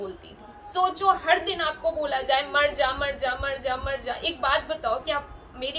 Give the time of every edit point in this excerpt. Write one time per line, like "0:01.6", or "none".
none